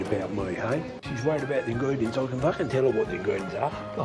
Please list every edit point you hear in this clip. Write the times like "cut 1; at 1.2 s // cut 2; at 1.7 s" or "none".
cut 1; at 0.9 s